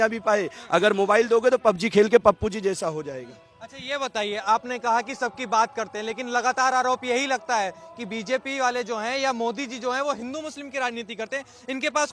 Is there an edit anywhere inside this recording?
no; 0 cuts

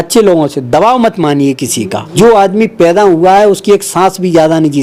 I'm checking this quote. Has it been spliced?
yes; 1 cut; at 2.0 s

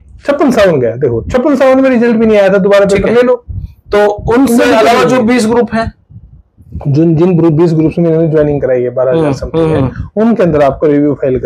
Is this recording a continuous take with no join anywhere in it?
yes; 0 cuts

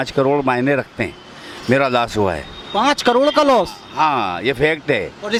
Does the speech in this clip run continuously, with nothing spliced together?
yes; 0 cuts

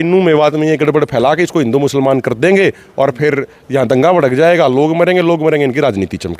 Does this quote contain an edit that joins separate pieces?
no; 0 cuts

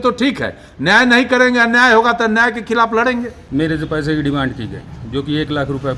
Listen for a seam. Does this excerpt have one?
yes; 1 cut; at 3.4 s

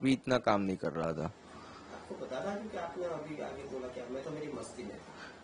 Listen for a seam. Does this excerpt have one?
no; 0 cuts

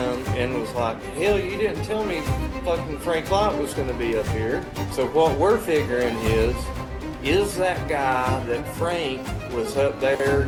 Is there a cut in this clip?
no; 0 cuts

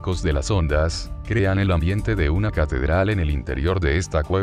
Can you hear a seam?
yes; 1 cut; at 0.9 s

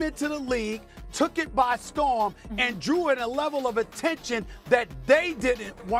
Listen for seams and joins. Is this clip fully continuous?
yes; 0 cuts

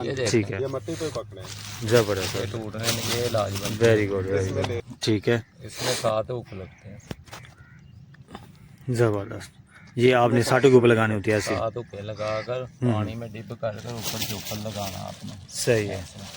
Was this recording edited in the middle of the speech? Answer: yes; 1 cut; at 4.8 s

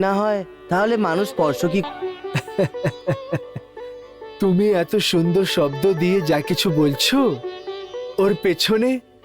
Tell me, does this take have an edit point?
yes; 1 cut; at 1.8 s

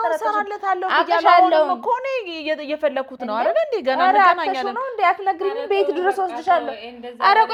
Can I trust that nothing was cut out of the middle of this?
yes; 0 cuts

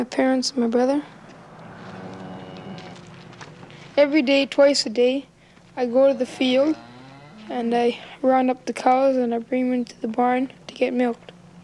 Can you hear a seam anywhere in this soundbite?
no; 0 cuts

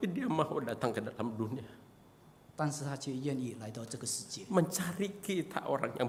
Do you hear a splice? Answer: no; 0 cuts

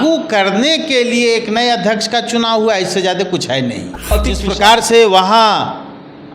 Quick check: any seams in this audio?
yes; 1 cut; at 4.4 s

